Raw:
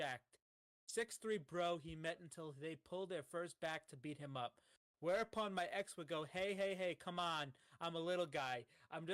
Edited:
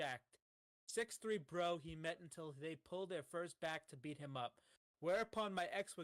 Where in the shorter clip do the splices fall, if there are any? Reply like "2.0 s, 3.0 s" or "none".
none